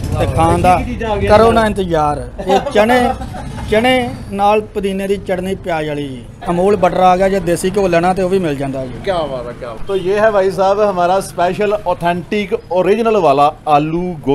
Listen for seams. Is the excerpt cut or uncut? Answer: uncut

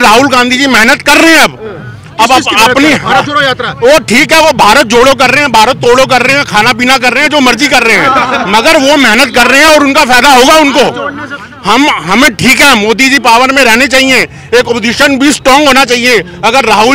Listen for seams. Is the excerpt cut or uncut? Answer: uncut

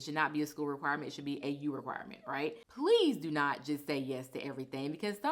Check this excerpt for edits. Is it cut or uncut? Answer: cut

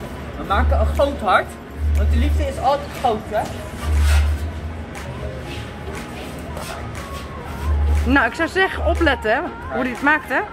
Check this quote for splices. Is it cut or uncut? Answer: uncut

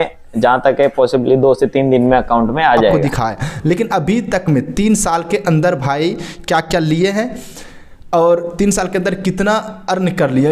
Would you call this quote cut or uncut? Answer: cut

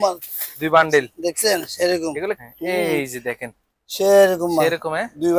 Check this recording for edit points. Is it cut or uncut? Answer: cut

